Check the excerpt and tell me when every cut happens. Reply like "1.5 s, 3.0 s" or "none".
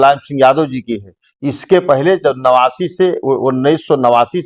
none